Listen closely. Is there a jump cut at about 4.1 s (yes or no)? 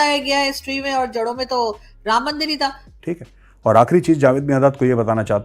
no